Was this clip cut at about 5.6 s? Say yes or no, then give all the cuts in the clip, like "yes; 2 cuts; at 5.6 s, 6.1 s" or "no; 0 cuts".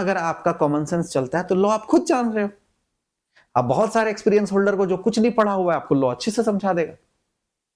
no; 0 cuts